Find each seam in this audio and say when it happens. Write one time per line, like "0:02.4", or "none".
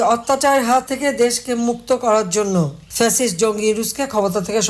0:00.9
0:02.8